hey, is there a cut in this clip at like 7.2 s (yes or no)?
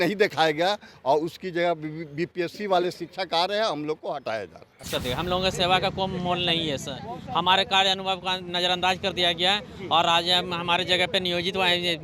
no